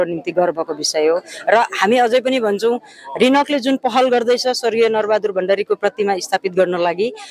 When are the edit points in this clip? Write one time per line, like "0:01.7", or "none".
none